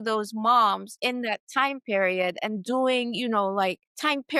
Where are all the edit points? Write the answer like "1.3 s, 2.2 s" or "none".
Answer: none